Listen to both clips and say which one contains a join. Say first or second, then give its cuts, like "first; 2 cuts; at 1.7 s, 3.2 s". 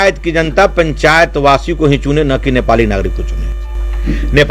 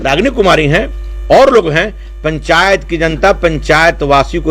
first; 1 cut; at 3.4 s